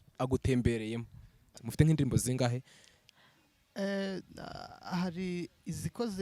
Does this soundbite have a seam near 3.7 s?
no; 1 cut; at 1.5 s

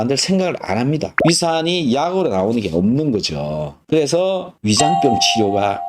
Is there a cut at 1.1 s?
yes; 1 cut; at 1.1 s

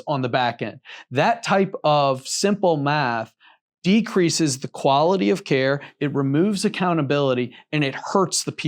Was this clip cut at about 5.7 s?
no; 0 cuts

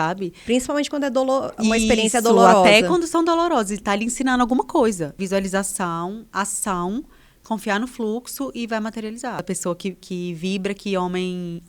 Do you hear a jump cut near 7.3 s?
no; 2 cuts; at 5.2 s, 9.4 s

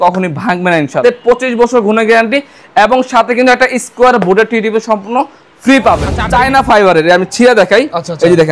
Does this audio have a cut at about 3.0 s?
no; 2 cuts; at 0.9 s, 6.1 s

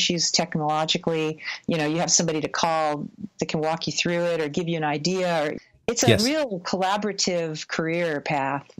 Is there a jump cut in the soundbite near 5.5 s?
yes; 1 cut; at 5.5 s

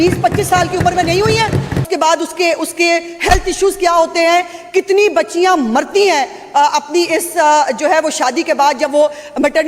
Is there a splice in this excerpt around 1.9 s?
yes; 1 cut; at 1.9 s

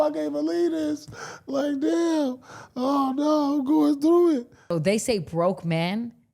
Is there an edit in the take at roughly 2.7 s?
no; 1 cut; at 4.7 s

